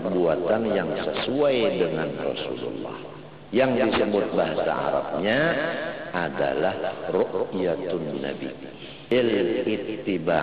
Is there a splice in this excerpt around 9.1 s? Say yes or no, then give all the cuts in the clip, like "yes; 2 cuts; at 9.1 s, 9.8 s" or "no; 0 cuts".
yes; 1 cut; at 9.1 s